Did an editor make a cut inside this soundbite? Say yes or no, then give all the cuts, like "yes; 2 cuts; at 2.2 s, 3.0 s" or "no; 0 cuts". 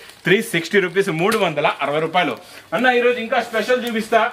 no; 0 cuts